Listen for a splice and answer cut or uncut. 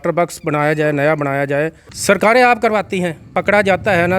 cut